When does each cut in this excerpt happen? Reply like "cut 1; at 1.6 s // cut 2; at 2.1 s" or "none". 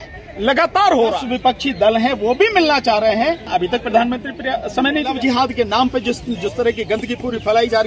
cut 1; at 1.2 s // cut 2; at 3.5 s // cut 3; at 5.2 s